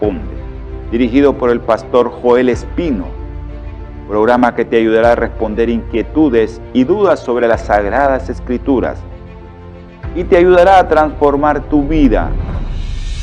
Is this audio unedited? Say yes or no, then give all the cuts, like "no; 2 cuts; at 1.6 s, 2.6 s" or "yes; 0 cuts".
yes; 0 cuts